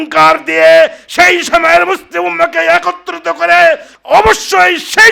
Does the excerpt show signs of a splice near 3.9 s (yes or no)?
yes